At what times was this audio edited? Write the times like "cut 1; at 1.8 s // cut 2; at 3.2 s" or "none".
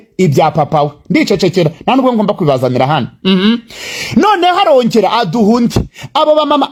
none